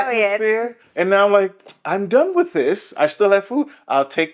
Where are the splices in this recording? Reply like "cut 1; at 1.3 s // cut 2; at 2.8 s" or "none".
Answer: none